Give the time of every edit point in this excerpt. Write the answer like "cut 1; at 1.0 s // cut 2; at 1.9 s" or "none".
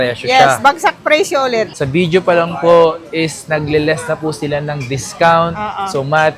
cut 1; at 1.7 s